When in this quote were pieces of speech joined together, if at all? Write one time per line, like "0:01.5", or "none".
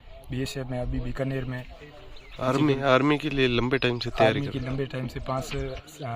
none